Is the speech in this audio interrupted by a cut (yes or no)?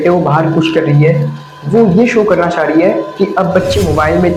no